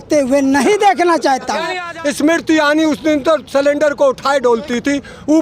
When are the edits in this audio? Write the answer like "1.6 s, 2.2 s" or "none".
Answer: 1.7 s